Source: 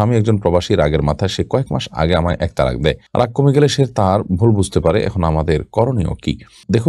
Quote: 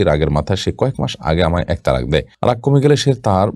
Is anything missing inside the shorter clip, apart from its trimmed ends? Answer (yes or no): no